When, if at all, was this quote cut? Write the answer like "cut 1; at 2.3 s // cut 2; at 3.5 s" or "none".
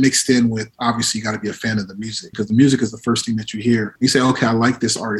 cut 1; at 2.3 s // cut 2; at 3.9 s